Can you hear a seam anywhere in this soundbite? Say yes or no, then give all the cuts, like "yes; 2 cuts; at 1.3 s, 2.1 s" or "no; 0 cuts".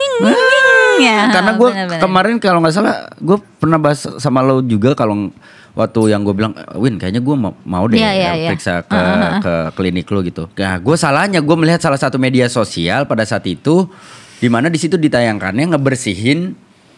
no; 0 cuts